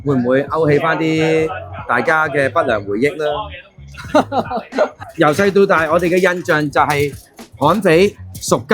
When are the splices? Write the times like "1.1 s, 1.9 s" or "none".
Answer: 5.0 s